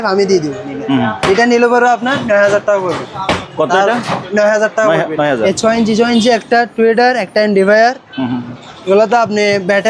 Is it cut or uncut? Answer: cut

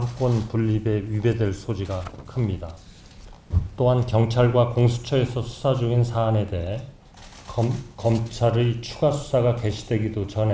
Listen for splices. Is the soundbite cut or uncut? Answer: uncut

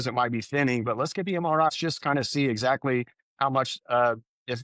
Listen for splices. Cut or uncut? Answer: cut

